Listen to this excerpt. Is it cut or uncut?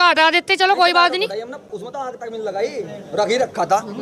uncut